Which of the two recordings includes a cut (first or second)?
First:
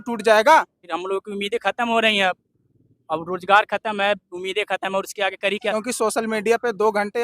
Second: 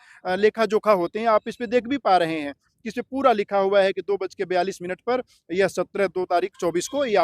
first